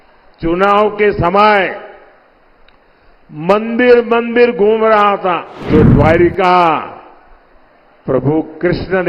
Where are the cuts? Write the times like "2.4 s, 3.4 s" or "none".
5.7 s